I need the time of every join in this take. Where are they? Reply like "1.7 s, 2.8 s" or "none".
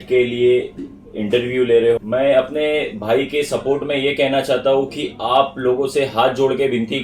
2.0 s